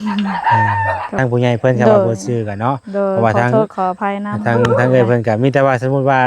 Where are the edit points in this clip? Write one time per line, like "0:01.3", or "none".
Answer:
0:01.2